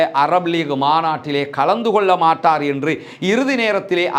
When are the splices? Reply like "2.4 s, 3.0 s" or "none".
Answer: none